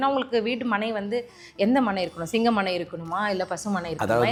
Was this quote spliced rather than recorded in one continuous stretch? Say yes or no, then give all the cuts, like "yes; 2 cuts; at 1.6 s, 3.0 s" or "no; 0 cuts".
no; 0 cuts